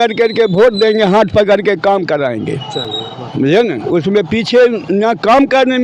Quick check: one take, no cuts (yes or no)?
yes